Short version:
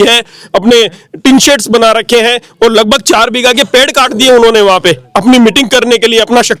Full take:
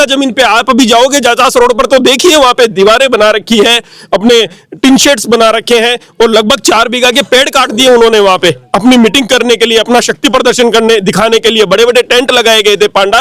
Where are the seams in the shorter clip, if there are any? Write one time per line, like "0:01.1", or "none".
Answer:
none